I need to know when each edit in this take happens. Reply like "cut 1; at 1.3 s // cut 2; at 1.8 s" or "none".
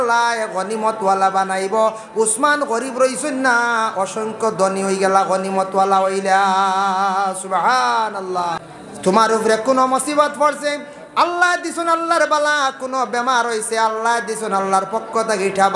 cut 1; at 8.7 s